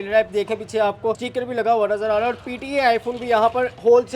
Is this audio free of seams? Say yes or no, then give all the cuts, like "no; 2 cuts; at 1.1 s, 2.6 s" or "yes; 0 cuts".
no; 1 cut; at 1.2 s